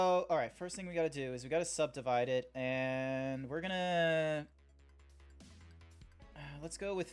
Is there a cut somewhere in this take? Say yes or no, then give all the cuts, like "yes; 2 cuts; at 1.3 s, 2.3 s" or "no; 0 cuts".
yes; 2 cuts; at 2.6 s, 6.1 s